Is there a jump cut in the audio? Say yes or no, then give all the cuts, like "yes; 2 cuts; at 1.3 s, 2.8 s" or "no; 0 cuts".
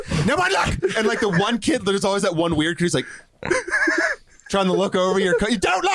no; 0 cuts